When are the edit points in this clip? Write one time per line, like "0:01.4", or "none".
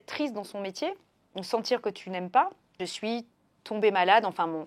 0:02.9